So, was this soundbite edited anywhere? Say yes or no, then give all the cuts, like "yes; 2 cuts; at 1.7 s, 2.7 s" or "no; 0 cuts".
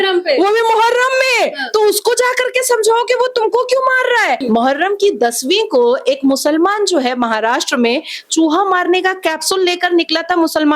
yes; 1 cut; at 4.4 s